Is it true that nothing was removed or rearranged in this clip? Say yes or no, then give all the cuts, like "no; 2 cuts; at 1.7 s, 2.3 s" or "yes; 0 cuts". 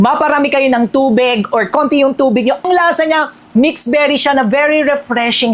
no; 1 cut; at 2.7 s